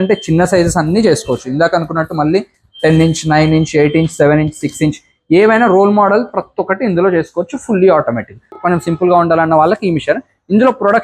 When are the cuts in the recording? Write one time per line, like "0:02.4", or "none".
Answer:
0:08.6